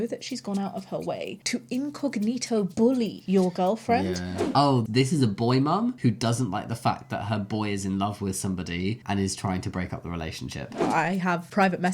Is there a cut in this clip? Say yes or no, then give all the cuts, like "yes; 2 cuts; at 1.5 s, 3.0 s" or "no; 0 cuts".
yes; 2 cuts; at 4.4 s, 10.7 s